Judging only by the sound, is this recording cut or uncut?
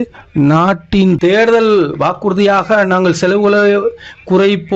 cut